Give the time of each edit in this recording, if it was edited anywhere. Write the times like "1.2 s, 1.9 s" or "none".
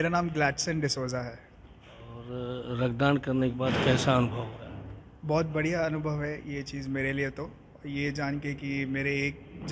none